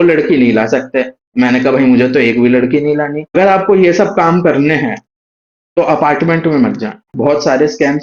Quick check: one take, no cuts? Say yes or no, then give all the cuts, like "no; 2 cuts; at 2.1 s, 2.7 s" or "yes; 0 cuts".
no; 2 cuts; at 3.4 s, 7.1 s